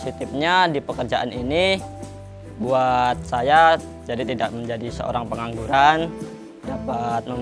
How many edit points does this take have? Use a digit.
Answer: 0